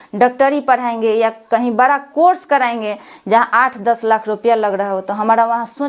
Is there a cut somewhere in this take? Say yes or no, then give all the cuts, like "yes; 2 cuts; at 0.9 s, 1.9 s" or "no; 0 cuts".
no; 0 cuts